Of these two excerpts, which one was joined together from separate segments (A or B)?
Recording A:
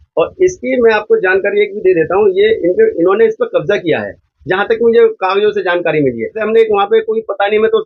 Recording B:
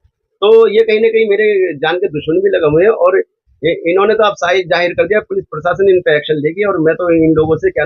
A